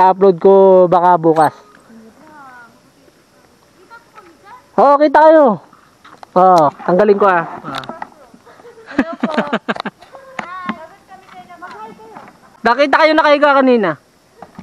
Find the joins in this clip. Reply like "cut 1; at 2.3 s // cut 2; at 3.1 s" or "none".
cut 1; at 12.4 s